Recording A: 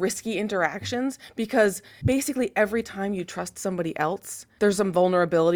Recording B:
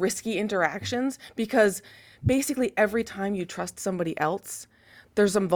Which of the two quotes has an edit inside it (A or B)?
A